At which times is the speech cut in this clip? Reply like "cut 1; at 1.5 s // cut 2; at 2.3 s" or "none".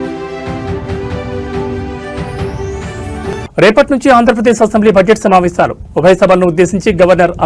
cut 1; at 3.1 s